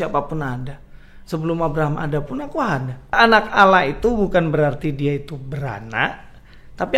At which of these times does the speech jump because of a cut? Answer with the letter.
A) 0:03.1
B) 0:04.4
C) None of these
A